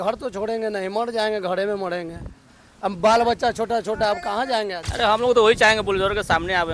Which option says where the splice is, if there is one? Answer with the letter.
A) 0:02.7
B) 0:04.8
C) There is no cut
B